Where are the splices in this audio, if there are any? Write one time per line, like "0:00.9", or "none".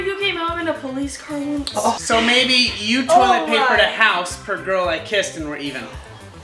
0:02.0